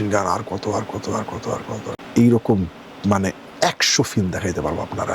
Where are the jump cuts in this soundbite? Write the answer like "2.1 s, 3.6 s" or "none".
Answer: 2.0 s